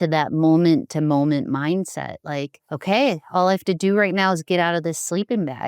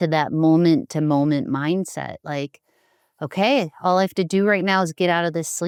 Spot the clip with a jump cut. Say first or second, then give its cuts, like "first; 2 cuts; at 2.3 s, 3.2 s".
first; 1 cut; at 2.6 s